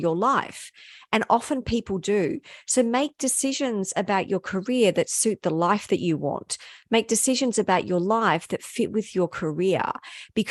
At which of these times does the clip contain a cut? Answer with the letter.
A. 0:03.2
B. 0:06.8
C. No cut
C